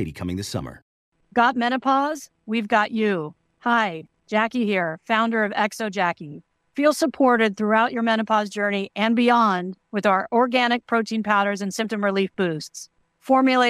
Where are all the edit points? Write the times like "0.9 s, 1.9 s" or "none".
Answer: 1.0 s